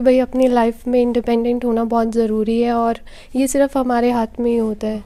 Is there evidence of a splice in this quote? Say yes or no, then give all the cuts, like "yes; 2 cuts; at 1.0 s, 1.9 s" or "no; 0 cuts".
no; 0 cuts